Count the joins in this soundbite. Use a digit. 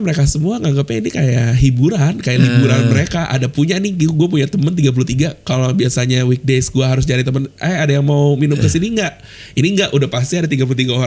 0